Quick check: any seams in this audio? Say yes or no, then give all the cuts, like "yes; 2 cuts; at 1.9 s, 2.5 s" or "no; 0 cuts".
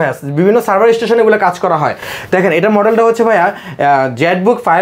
no; 0 cuts